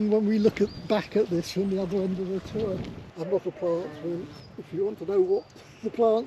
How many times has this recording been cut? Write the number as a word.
one